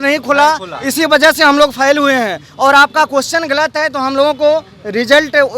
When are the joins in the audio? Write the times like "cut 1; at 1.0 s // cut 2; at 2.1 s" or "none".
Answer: none